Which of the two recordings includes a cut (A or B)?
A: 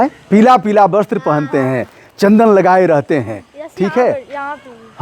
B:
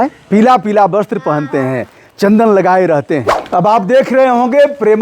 B